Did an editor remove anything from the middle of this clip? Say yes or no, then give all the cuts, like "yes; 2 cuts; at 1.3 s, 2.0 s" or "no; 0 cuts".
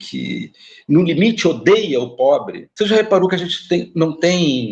yes; 1 cut; at 2.6 s